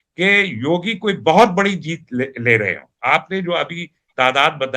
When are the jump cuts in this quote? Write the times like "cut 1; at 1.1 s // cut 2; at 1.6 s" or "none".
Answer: none